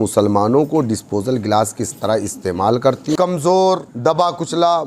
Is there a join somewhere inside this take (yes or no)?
yes